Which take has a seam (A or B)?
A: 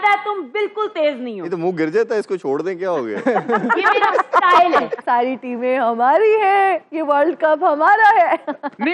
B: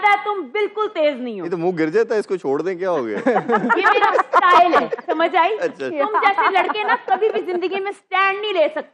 A